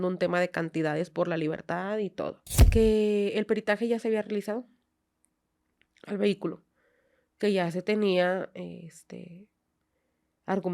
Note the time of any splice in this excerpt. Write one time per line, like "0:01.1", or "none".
0:02.5